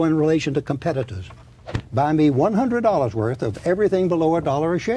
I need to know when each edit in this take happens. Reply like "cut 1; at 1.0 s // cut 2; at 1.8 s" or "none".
cut 1; at 1.8 s